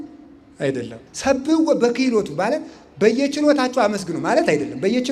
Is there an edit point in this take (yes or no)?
yes